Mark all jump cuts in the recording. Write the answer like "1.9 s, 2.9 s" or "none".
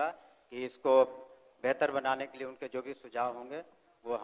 none